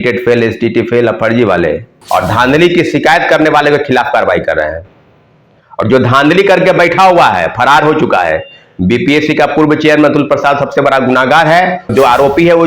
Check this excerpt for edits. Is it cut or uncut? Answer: cut